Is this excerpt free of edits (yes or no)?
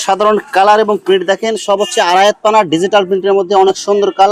yes